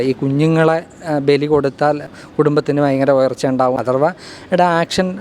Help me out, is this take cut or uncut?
cut